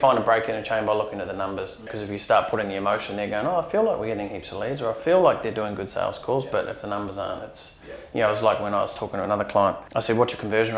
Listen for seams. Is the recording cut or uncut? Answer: cut